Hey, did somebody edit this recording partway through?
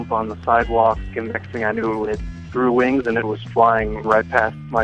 yes; 2 cuts; at 1.1 s, 4.0 s

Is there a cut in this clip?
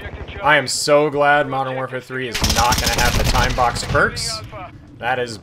no; 0 cuts

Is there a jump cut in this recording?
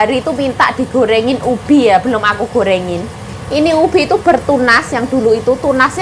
no; 0 cuts

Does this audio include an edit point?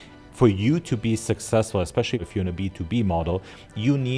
yes; 1 cut; at 2.2 s

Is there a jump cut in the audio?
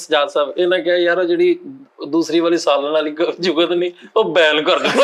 no; 0 cuts

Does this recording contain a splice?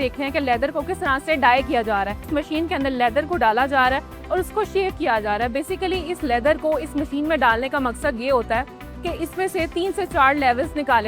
yes; 1 cut; at 2.2 s

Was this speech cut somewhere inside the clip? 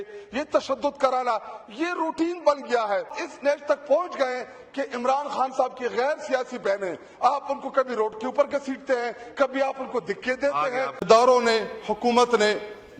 yes; 2 cuts; at 3.2 s, 11.0 s

